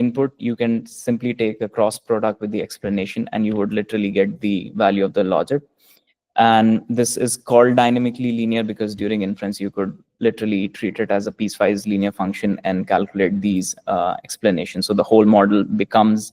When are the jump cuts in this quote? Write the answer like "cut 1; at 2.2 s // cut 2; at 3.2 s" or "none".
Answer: cut 1; at 15.3 s